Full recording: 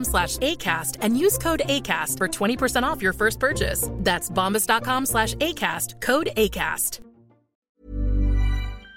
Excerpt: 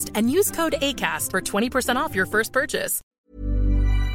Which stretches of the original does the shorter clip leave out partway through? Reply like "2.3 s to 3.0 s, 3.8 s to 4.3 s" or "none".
3.8 s to 7.5 s